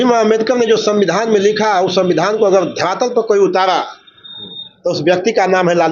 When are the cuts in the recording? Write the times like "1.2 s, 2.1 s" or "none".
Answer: none

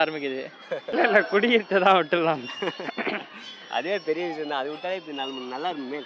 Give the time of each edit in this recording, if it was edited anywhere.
0.9 s

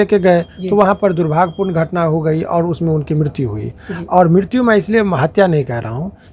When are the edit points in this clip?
none

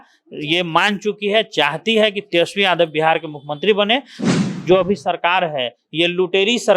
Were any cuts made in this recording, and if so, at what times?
4.2 s

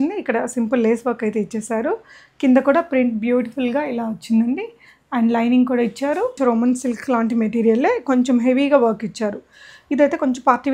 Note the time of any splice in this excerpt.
6.4 s

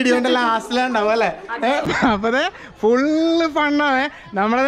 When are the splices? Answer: 1.9 s

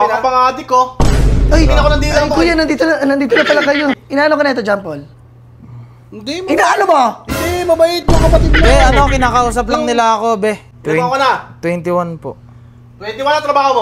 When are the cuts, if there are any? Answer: 4.0 s, 10.7 s

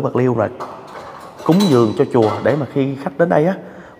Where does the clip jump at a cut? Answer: none

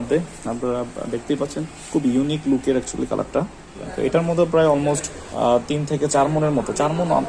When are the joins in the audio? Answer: 1.7 s, 3.8 s

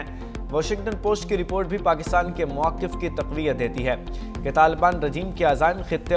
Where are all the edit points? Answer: none

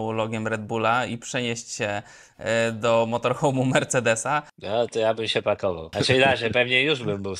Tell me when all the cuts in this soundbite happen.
4.5 s, 5.9 s

